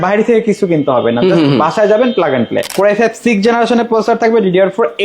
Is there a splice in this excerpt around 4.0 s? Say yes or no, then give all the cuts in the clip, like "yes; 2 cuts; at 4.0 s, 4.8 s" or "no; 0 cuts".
no; 1 cut; at 2.7 s